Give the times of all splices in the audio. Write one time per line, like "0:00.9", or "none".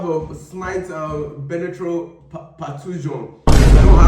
0:03.1